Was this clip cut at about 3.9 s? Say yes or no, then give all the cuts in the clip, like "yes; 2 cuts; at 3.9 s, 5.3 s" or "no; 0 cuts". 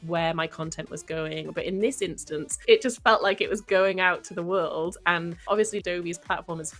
no; 3 cuts; at 1.5 s, 2.6 s, 5.3 s